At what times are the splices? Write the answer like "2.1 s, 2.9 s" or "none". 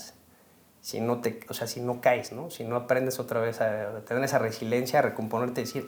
none